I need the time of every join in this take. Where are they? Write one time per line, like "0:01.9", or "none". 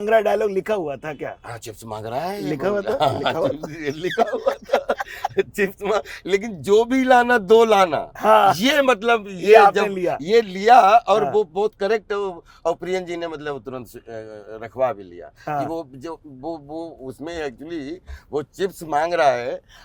none

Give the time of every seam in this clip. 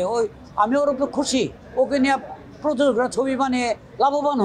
none

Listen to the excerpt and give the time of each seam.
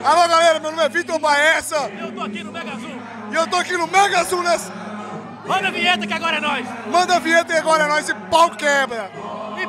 none

